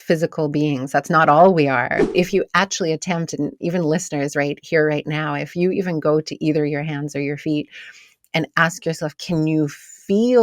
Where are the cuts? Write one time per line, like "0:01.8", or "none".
0:02.1

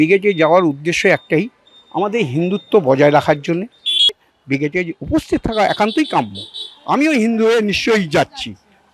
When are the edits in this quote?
0:04.2

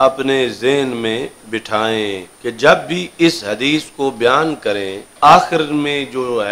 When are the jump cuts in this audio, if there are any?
0:02.3
0:05.0

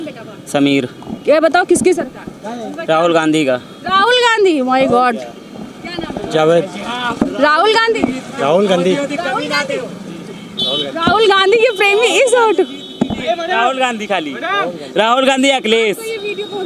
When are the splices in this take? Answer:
none

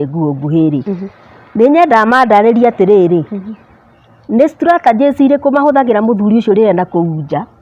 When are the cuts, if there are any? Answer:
none

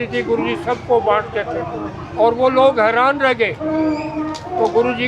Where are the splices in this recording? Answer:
none

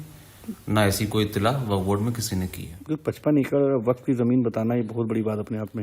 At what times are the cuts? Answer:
none

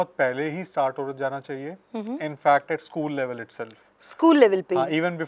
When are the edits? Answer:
none

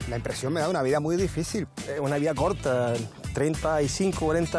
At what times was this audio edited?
0:01.7

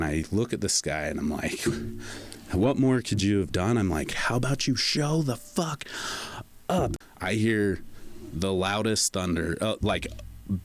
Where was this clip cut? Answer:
0:04.1
0:06.9

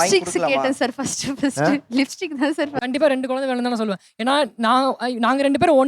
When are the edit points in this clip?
0:02.7

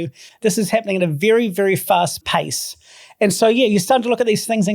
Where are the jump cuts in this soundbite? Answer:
0:02.2

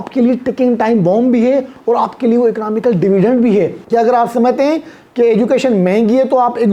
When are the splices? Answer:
0:03.8

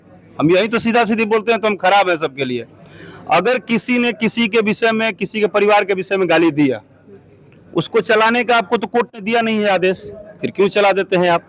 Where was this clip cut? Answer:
none

